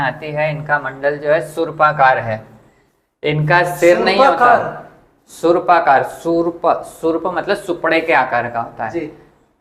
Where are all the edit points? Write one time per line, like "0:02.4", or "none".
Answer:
none

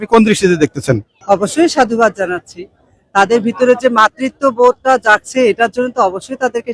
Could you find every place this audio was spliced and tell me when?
none

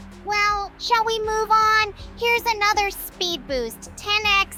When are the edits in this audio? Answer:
none

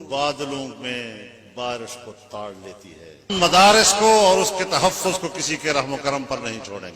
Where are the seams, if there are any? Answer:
0:03.3

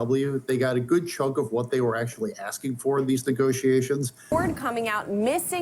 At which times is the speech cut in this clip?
0:04.2

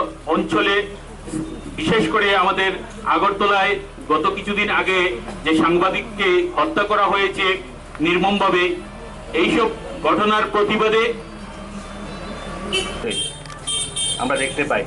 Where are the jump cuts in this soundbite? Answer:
0:13.0

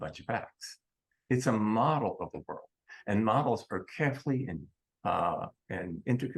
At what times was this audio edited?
none

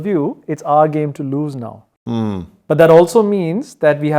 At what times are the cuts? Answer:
none

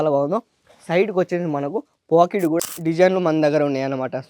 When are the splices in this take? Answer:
0:02.6

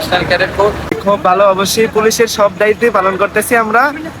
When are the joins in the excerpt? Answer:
0:01.0

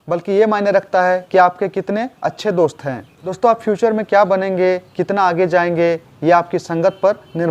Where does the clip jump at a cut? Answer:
0:03.2

